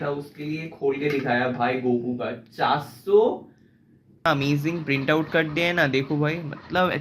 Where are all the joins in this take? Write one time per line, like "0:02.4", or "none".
0:04.3